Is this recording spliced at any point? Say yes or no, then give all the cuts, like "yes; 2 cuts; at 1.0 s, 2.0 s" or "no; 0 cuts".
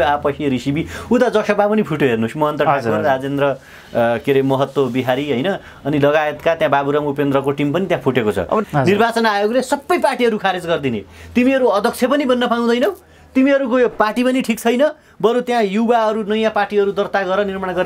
yes; 1 cut; at 8.6 s